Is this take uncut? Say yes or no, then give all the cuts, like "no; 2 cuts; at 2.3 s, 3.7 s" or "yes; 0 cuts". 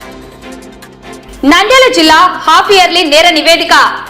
no; 1 cut; at 1.1 s